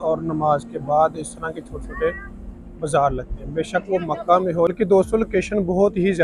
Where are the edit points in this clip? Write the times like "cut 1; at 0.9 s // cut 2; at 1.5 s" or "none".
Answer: cut 1; at 4.7 s